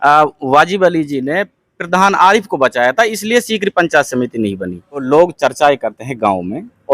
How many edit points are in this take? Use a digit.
1